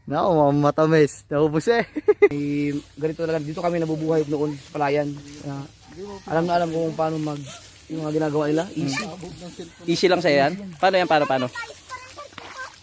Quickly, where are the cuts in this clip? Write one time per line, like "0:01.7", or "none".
0:02.3